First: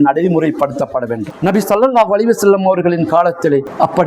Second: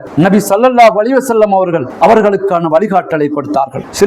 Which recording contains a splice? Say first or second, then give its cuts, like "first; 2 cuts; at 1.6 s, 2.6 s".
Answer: first; 1 cut; at 1.3 s